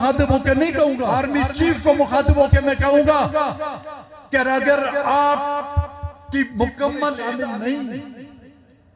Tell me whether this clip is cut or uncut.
cut